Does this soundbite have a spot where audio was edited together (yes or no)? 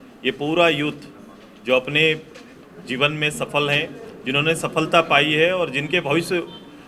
no